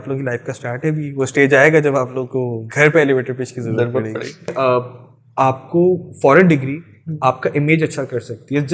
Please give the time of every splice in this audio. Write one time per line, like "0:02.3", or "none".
0:04.5